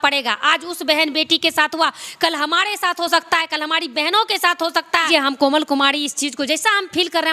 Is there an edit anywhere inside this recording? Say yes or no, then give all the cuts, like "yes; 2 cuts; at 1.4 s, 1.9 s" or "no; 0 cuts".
yes; 1 cut; at 5.1 s